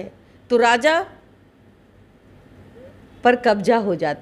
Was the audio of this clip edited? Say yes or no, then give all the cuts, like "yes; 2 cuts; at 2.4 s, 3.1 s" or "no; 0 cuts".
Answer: no; 0 cuts